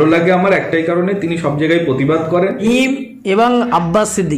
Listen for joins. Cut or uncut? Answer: cut